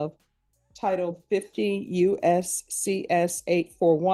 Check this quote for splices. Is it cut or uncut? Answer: uncut